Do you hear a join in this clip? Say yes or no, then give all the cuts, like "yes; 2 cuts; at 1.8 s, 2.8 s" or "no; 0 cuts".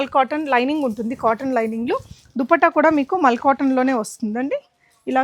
no; 0 cuts